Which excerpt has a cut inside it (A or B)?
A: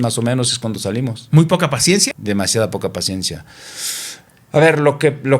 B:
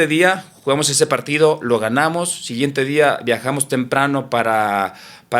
A